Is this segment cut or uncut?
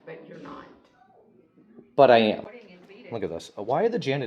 cut